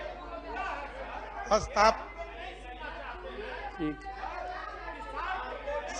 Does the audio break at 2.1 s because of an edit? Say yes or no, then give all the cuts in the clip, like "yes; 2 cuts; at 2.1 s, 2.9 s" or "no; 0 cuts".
no; 0 cuts